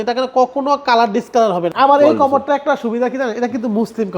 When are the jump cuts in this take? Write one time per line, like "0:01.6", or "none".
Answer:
0:01.7